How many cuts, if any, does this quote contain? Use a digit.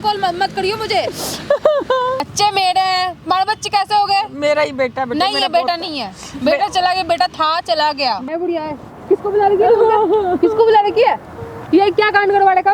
2